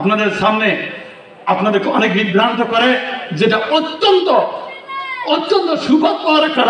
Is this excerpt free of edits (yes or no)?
yes